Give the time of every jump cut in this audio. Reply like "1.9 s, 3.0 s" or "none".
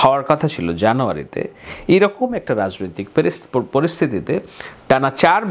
none